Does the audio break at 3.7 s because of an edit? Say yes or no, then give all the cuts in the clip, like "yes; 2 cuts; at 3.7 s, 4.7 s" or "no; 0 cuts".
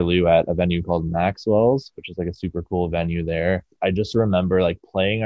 yes; 1 cut; at 3.7 s